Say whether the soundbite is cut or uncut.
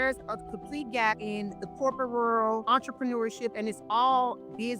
cut